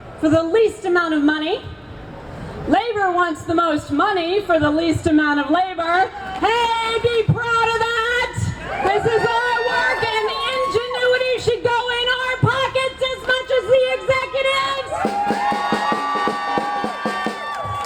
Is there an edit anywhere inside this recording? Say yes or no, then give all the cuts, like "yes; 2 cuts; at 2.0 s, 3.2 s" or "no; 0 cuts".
no; 0 cuts